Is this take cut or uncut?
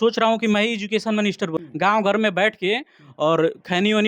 cut